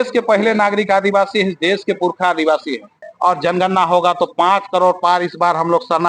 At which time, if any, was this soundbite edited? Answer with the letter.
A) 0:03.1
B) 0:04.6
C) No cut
A